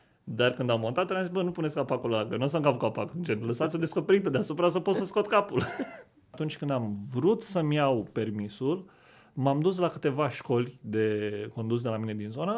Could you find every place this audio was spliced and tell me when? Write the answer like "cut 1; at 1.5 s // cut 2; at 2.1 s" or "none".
cut 1; at 6.4 s